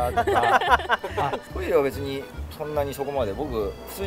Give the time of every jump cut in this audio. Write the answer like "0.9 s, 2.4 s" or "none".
1.4 s